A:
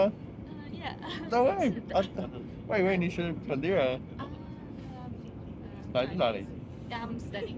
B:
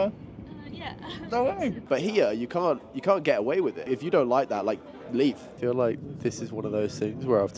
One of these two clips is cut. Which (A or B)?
B